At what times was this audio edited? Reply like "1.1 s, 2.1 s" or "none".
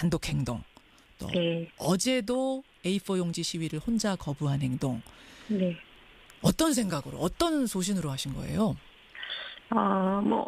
none